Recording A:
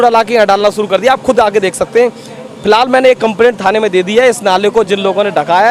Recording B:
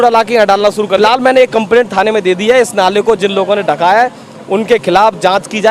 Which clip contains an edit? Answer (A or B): B